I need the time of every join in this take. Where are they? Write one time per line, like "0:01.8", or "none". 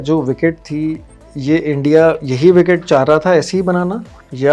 none